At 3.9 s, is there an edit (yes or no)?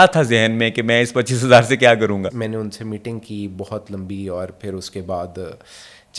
no